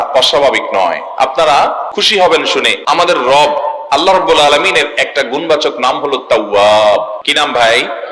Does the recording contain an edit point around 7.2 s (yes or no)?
yes